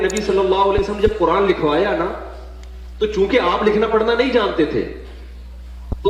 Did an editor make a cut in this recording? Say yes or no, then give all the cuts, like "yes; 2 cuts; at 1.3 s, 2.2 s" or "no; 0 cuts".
no; 0 cuts